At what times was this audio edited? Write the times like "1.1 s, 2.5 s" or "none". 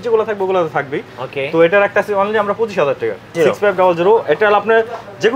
3.3 s